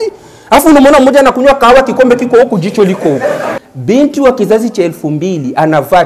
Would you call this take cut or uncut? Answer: cut